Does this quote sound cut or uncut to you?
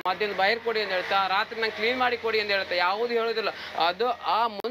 uncut